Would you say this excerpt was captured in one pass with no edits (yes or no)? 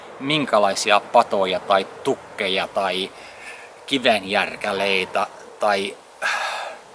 yes